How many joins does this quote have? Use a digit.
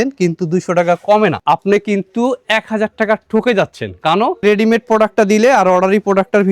1